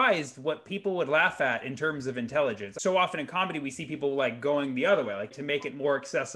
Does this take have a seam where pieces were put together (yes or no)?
yes